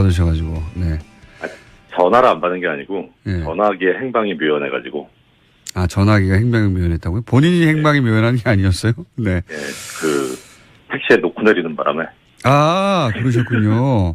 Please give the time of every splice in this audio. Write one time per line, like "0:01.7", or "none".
0:11.1